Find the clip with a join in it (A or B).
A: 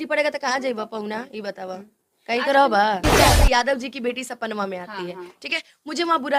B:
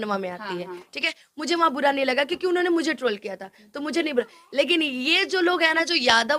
A